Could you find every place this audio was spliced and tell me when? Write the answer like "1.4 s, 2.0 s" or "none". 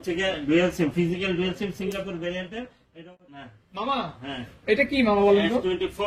2.9 s

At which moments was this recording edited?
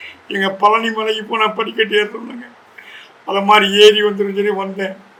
none

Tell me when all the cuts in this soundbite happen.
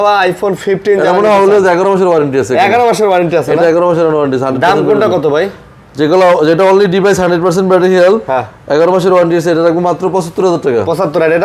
none

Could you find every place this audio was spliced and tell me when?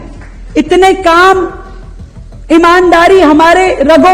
none

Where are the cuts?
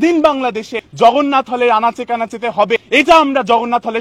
none

